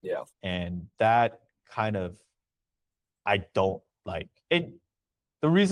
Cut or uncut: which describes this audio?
uncut